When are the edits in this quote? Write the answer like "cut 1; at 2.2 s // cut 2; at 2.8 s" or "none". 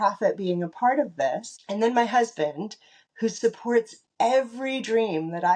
cut 1; at 1.5 s